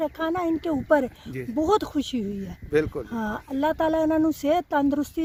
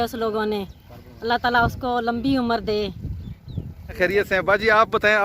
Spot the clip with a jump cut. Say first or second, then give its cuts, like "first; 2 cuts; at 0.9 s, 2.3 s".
second; 1 cut; at 4.0 s